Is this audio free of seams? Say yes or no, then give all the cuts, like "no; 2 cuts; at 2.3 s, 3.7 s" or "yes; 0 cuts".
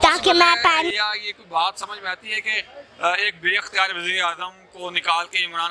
no; 1 cut; at 0.9 s